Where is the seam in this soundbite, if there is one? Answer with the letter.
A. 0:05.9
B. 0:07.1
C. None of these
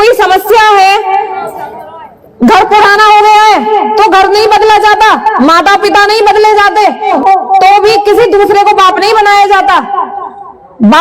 B